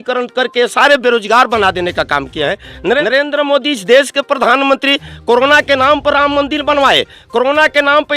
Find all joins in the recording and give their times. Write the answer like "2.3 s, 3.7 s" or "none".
3.0 s